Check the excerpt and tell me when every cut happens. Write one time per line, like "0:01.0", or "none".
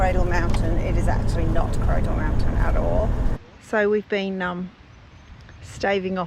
0:03.4